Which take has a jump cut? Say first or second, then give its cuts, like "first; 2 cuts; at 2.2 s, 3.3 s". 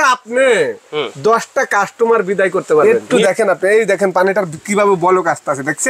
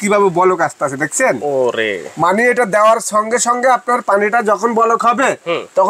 first; 1 cut; at 2.8 s